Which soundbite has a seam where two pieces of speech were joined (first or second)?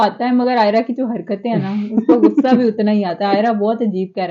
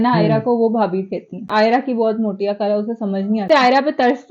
second